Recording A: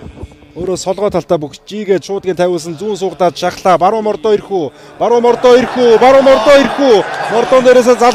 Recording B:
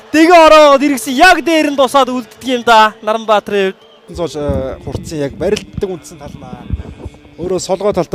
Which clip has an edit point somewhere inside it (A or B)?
B